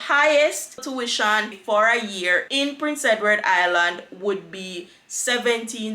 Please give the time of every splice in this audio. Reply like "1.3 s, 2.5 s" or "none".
0.9 s